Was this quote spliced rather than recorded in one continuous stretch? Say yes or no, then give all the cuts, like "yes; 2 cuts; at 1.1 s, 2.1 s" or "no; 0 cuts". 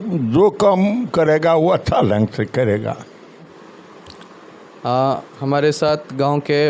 no; 0 cuts